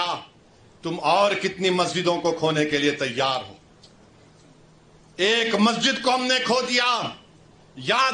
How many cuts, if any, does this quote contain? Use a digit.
0